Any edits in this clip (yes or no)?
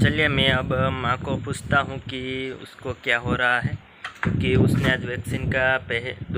no